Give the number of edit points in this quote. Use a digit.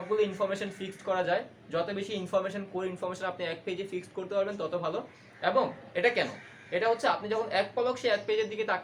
0